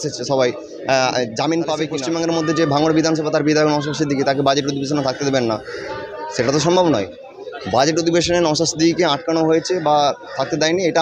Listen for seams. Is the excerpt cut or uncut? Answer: cut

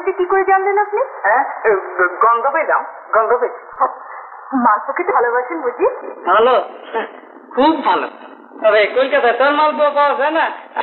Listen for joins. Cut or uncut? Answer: uncut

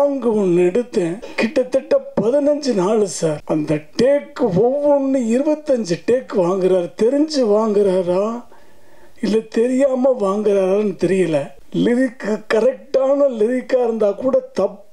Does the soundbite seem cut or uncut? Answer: cut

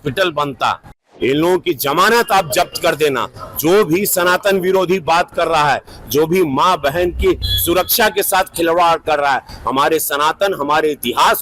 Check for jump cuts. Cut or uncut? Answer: cut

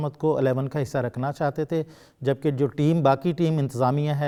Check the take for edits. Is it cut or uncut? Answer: uncut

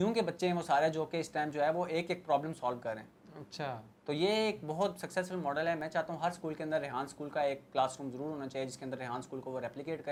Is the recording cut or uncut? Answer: uncut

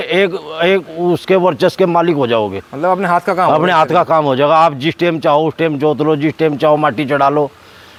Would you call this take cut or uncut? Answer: uncut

